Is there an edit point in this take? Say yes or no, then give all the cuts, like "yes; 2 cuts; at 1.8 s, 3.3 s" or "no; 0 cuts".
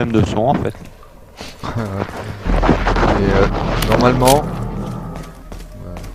no; 0 cuts